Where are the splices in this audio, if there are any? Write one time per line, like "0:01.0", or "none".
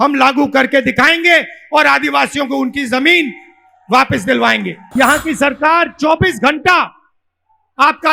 0:04.8